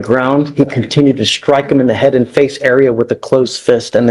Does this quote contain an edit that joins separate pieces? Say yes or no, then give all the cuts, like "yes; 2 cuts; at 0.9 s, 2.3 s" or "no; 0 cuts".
no; 0 cuts